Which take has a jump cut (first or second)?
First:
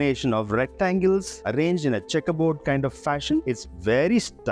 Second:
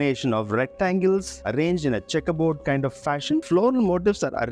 second